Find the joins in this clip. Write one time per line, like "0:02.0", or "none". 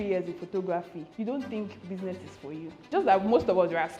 0:01.0
0:02.9